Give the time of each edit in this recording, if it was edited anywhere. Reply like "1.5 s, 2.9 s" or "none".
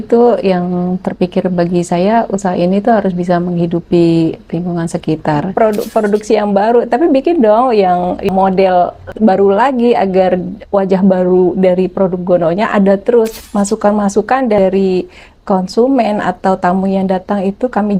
5.5 s, 8.3 s, 9.0 s, 13.4 s, 14.6 s